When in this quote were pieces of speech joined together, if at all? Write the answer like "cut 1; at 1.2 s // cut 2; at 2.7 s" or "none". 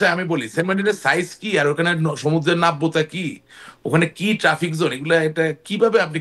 none